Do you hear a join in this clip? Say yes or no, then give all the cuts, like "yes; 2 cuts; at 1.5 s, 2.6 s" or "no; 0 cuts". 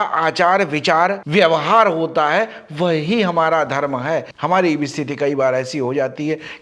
yes; 1 cut; at 4.3 s